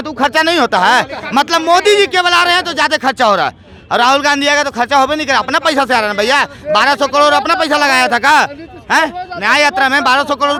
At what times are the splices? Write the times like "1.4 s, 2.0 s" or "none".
none